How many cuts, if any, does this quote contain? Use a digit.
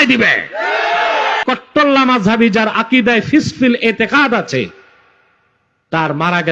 1